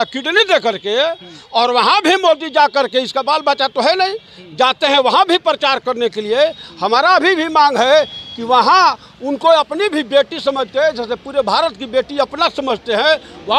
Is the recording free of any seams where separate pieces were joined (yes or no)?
yes